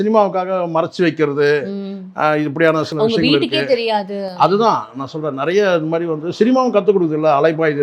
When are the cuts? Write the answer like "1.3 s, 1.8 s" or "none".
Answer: none